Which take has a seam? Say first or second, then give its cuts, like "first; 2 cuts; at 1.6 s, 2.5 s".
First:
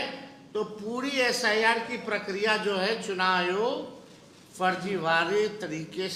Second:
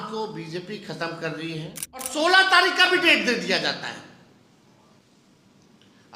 second; 1 cut; at 2.1 s